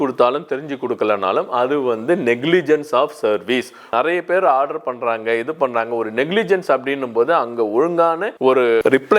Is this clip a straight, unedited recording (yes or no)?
no